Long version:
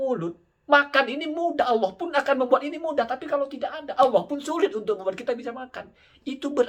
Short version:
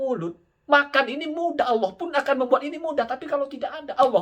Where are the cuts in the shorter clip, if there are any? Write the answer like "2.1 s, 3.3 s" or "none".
none